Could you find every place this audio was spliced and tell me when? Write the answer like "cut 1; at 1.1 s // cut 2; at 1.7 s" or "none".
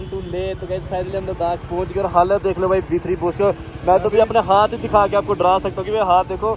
none

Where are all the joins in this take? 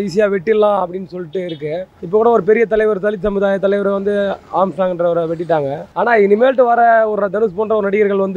cut 1; at 1.9 s // cut 2; at 5.8 s

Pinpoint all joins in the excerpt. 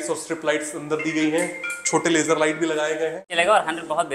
cut 1; at 3.2 s

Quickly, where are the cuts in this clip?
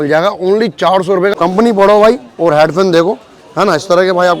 cut 1; at 1.3 s

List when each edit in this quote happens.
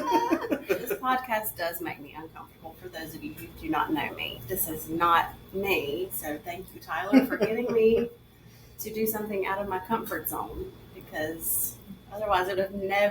cut 1; at 1.0 s

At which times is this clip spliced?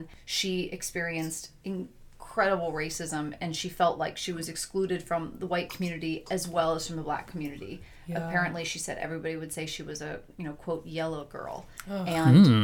none

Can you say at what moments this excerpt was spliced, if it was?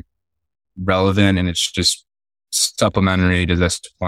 none

